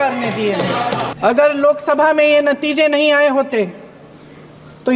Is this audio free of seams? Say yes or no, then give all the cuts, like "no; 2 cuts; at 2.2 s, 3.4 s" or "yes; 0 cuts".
no; 1 cut; at 1.1 s